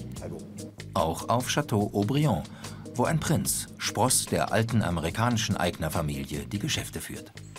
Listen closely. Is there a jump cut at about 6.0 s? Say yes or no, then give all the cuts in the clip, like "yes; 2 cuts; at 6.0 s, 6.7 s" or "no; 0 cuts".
yes; 1 cut; at 6.0 s